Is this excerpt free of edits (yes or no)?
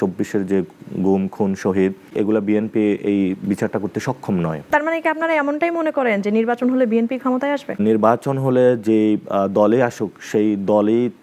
no